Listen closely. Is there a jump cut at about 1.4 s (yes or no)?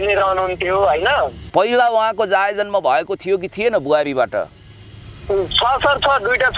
yes